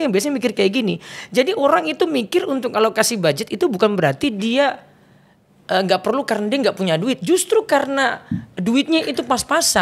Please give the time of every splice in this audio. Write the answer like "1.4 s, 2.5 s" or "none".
none